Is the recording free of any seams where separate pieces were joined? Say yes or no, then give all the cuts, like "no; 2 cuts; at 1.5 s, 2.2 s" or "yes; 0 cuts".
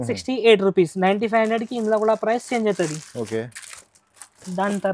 yes; 0 cuts